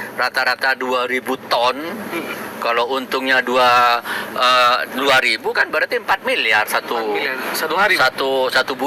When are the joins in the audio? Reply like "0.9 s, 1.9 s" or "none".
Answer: none